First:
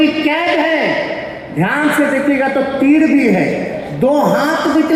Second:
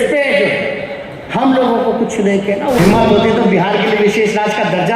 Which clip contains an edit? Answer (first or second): second